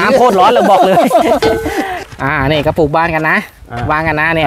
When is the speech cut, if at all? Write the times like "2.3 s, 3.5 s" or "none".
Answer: 2.0 s